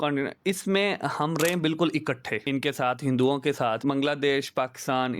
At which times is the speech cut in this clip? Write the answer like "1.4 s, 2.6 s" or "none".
2.3 s, 3.8 s